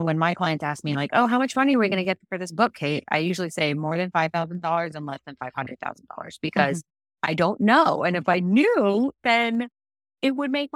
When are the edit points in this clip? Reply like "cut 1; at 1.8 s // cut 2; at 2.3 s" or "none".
none